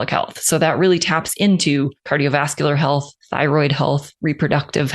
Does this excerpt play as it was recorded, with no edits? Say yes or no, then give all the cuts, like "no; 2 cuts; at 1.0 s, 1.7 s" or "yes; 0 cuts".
no; 3 cuts; at 2.0 s, 3.2 s, 4.1 s